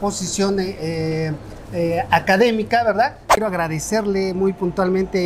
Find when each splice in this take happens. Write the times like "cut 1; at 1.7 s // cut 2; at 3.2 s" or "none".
cut 1; at 3.4 s